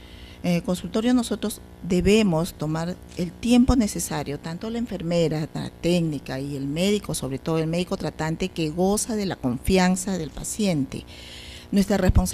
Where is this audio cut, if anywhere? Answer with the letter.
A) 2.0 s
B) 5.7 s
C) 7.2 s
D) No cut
A